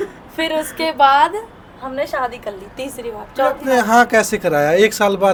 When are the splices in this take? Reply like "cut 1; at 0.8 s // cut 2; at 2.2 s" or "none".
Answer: none